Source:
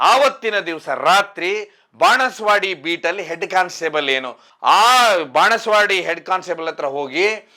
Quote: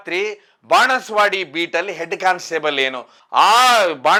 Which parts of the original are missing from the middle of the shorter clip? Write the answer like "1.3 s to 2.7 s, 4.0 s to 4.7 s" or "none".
none